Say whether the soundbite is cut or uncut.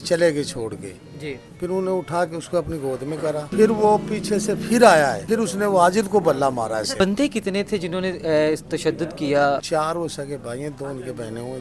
cut